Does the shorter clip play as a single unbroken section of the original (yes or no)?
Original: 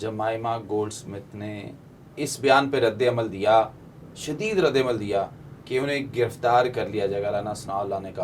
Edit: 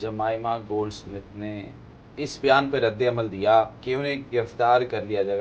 no